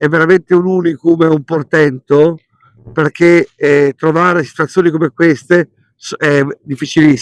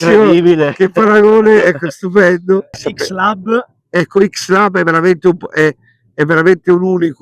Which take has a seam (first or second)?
second